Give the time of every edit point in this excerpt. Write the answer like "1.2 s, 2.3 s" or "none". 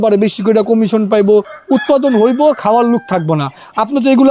1.5 s